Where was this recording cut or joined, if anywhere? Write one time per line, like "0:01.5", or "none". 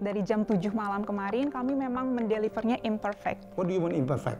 0:03.5